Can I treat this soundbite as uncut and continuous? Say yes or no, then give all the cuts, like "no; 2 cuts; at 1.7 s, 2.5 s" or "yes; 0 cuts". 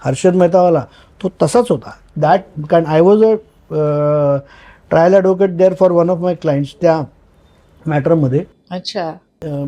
yes; 0 cuts